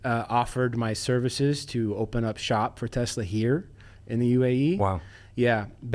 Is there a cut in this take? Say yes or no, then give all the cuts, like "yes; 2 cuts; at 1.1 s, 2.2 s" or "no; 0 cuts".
no; 0 cuts